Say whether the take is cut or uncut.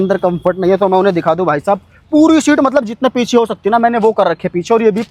uncut